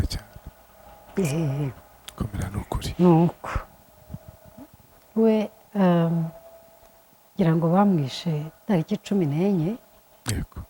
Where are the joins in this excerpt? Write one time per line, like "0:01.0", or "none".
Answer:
none